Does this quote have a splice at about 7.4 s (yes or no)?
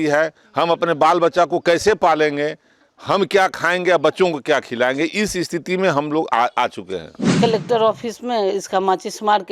yes